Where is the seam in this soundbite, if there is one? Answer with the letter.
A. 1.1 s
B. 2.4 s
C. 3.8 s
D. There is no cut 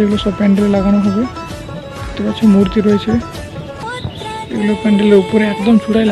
C